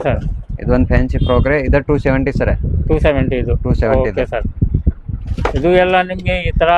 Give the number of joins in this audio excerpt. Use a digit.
0